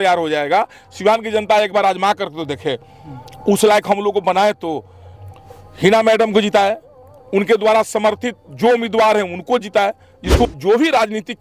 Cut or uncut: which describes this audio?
cut